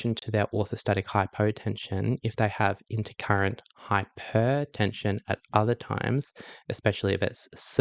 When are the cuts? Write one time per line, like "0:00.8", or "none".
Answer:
none

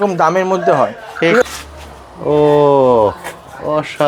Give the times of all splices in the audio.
0:01.4

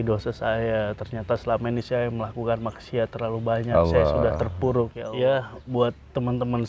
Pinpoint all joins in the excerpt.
0:05.0

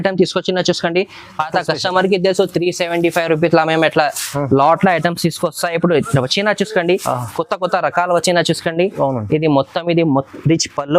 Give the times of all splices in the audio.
none

